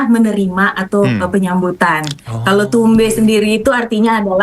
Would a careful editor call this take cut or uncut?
uncut